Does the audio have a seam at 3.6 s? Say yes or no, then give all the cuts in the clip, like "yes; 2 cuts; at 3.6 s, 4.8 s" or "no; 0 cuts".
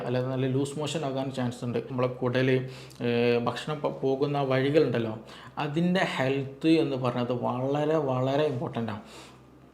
no; 1 cut; at 1.9 s